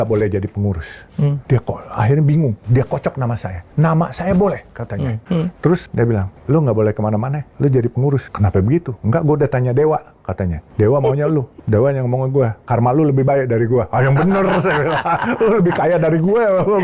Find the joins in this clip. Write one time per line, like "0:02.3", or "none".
0:01.4
0:02.6
0:03.5
0:05.2
0:06.0
0:07.4
0:08.3
0:10.6
0:11.6